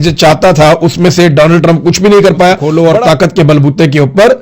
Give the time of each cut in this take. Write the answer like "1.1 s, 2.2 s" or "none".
2.6 s